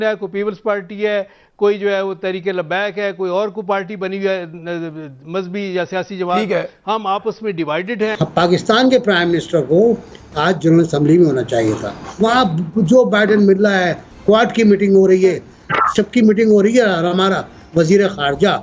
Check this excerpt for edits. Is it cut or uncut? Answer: cut